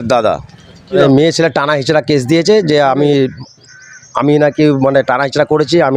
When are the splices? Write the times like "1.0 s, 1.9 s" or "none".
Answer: 1.1 s